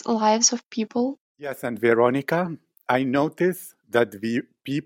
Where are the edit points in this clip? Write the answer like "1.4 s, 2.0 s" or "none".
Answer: 1.7 s